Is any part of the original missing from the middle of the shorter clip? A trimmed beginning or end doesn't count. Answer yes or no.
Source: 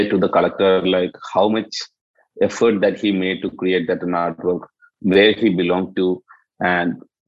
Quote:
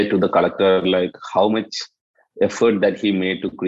no